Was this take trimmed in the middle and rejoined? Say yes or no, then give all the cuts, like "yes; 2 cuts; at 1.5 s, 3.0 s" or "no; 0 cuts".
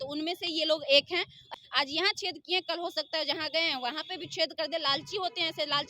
yes; 1 cut; at 1.5 s